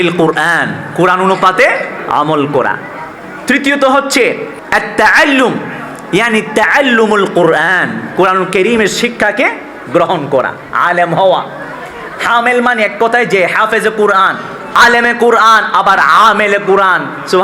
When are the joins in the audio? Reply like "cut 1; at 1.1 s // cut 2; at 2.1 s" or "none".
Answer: cut 1; at 4.5 s // cut 2; at 14.7 s